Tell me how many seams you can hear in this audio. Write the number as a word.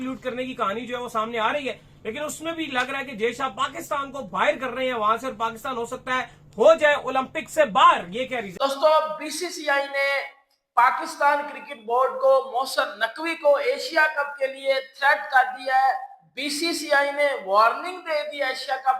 one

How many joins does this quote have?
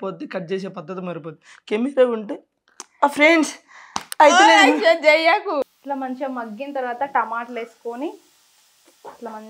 one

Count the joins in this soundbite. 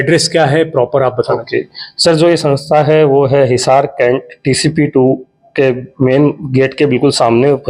zero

